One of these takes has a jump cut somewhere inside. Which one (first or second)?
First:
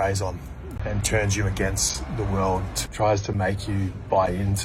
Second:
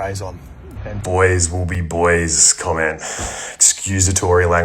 second